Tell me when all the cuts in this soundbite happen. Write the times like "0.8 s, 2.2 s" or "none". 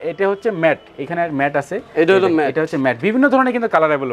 none